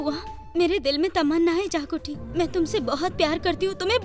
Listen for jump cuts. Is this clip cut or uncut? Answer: uncut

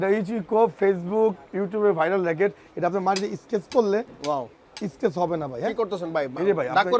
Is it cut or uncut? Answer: uncut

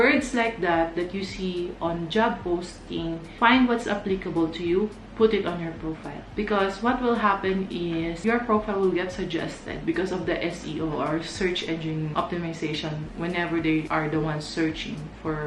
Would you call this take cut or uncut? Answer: uncut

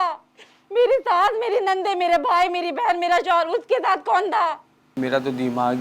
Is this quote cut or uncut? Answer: cut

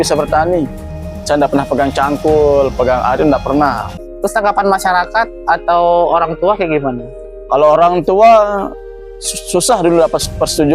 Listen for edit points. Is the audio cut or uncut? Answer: cut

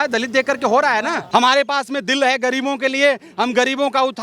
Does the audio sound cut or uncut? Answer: cut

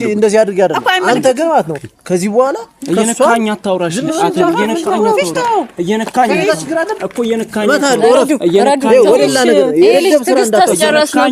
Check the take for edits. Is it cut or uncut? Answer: uncut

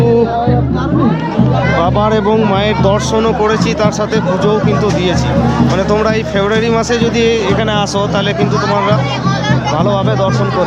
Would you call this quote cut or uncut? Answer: uncut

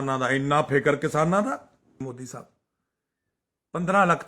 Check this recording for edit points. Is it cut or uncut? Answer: cut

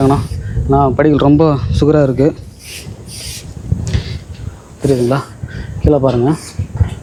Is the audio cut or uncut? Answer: uncut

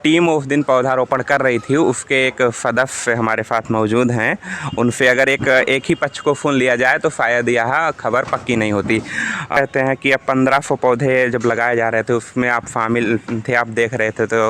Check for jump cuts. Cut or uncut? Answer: cut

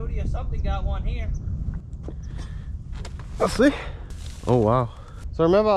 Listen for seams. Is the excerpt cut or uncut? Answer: uncut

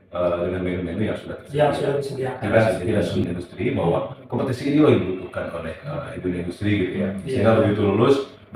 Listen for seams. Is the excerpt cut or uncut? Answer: cut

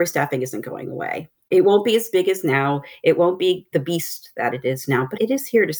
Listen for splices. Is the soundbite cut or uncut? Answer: cut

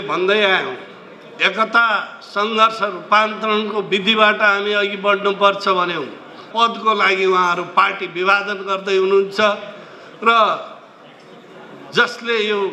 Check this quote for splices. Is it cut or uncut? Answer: cut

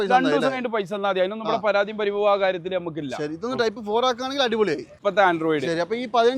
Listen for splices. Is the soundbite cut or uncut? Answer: cut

